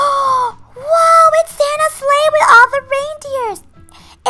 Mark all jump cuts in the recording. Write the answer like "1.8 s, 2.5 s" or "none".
none